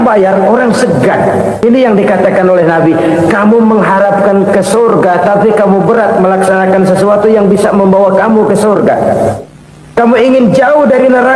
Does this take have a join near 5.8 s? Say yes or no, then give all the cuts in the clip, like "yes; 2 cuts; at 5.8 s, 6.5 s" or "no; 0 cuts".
no; 1 cut; at 1.6 s